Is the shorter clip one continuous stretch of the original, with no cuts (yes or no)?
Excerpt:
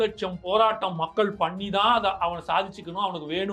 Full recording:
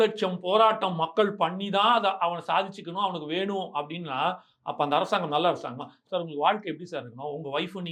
yes